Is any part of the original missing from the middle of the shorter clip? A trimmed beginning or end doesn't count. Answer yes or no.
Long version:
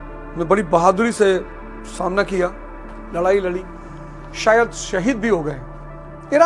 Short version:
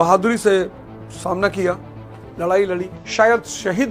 yes